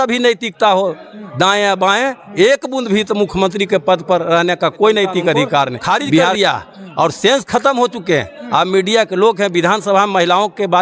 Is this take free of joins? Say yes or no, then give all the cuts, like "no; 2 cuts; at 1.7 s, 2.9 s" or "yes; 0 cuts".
no; 1 cut; at 6.3 s